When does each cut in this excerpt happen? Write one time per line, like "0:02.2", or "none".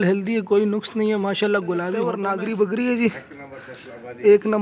0:02.2